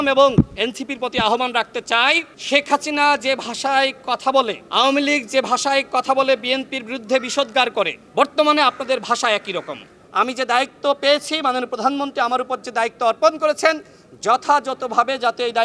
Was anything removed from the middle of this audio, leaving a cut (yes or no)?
yes